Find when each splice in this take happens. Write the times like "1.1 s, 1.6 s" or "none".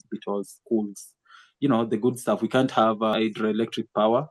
3.1 s